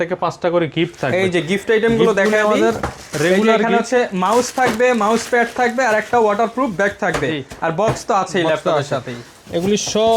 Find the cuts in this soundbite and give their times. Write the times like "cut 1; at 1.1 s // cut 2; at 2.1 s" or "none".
none